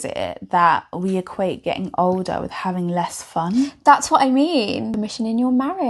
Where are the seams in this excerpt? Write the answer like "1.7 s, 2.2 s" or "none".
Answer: 4.9 s